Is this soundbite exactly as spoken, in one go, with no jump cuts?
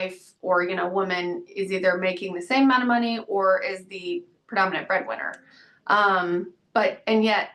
yes; 0 cuts

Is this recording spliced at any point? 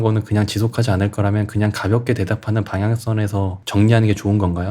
yes; 1 cut; at 3.6 s

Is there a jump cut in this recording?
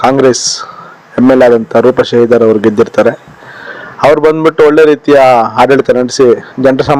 no; 0 cuts

